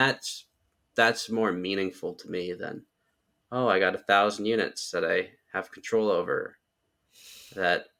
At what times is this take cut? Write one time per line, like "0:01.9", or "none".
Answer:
none

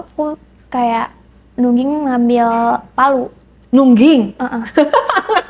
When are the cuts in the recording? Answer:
none

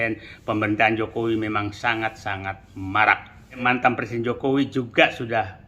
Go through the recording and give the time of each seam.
0:03.6

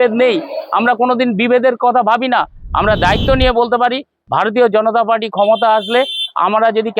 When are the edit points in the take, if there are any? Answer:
0:02.6

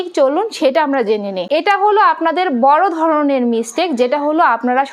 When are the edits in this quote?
0:01.5

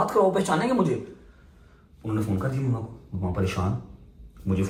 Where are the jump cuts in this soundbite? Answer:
none

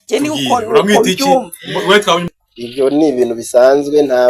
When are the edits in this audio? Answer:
0:02.3

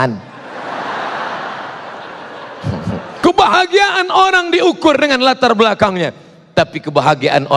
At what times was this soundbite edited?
0:03.2

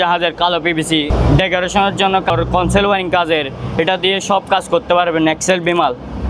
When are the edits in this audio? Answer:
0:01.1
0:02.3

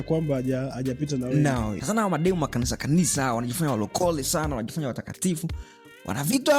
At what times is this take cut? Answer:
0:01.7

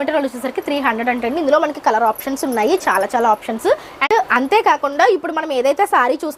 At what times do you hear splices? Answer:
none

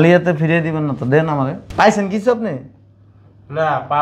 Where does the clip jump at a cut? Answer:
0:01.6

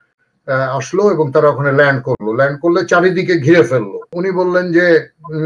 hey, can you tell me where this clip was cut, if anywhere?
0:04.1

